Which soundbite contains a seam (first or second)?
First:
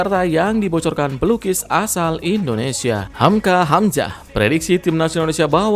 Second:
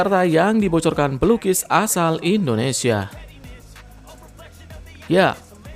first